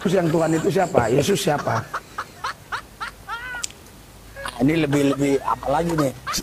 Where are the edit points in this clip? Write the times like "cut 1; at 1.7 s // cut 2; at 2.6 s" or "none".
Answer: none